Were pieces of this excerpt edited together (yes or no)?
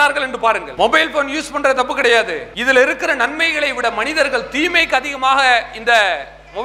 no